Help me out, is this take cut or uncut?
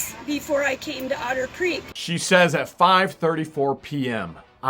cut